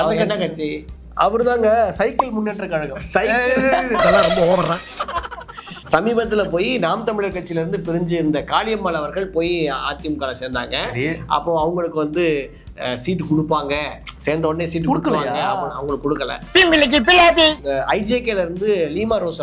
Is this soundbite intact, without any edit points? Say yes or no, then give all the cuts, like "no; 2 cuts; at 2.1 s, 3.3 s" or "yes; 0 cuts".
no; 2 cuts; at 5.8 s, 17.6 s